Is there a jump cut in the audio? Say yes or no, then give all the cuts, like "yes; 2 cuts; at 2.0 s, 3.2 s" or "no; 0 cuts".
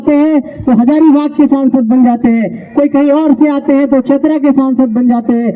no; 0 cuts